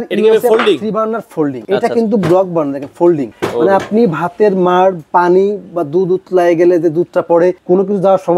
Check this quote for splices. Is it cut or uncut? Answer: uncut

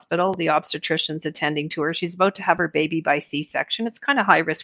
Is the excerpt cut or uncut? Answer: uncut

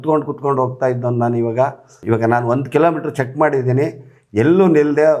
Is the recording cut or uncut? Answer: uncut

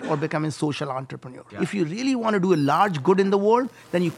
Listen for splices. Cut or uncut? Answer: cut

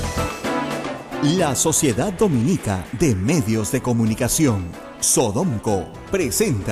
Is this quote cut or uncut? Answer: cut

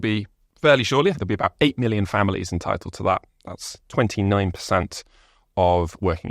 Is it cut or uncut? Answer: cut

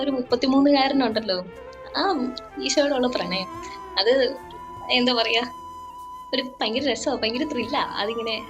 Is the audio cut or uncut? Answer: uncut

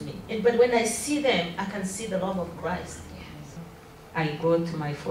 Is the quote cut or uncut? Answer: cut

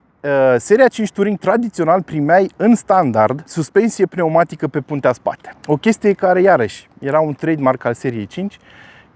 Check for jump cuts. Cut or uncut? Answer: cut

